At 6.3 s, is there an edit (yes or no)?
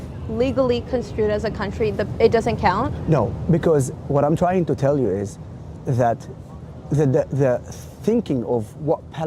no